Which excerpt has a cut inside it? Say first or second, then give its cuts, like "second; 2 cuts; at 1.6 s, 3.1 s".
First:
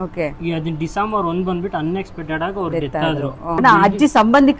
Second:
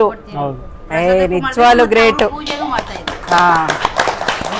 first; 1 cut; at 3.6 s